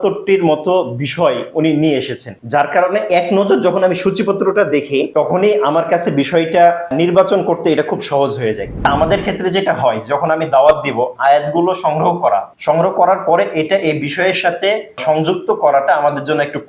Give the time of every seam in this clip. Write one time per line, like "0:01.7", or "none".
0:08.7